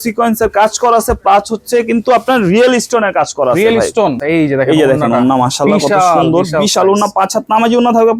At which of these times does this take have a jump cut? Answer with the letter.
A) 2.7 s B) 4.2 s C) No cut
B